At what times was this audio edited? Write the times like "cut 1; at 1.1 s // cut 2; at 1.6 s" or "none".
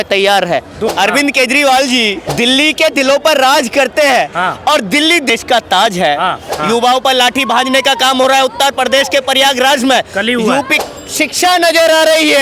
cut 1; at 0.9 s // cut 2; at 2.2 s // cut 3; at 5.3 s // cut 4; at 6.5 s // cut 5; at 10.8 s